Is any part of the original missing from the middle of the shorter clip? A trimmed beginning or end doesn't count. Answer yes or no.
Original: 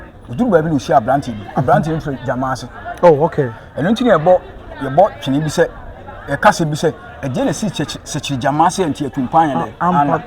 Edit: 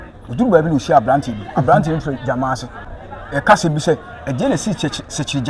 yes